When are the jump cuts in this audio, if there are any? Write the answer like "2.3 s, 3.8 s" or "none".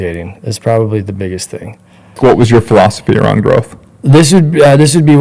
2.2 s

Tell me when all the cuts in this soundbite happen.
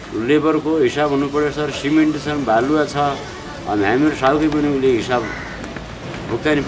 none

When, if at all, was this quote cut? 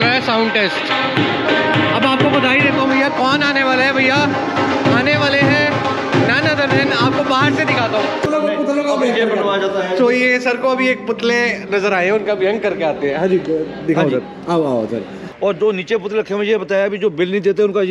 8.2 s, 15.2 s

